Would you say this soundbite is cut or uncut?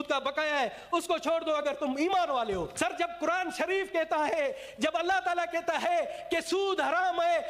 cut